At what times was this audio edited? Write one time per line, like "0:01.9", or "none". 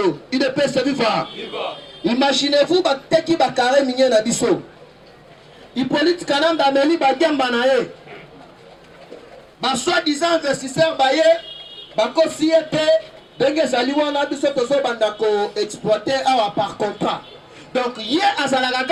none